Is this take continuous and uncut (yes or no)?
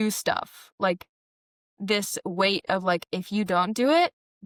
yes